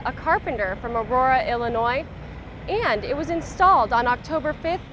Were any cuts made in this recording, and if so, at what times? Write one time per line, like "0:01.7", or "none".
none